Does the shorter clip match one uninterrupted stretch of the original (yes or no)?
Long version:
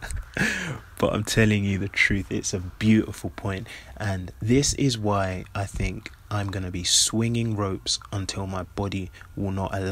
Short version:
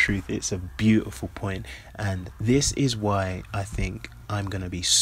yes